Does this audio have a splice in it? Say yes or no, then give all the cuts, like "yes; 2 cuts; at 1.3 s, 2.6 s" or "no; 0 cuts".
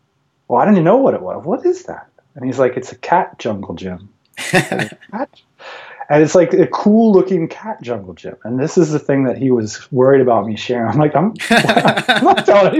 no; 0 cuts